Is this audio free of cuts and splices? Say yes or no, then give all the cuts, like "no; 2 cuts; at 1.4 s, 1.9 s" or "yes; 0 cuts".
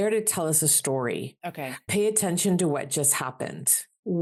yes; 0 cuts